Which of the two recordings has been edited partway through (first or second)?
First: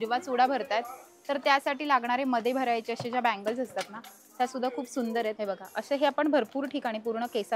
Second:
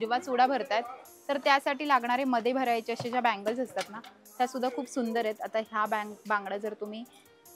first